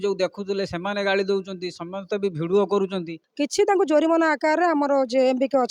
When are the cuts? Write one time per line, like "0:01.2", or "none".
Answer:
0:03.2